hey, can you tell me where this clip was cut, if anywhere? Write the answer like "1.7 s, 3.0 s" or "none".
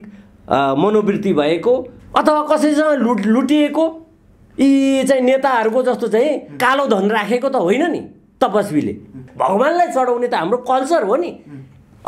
2.0 s, 9.3 s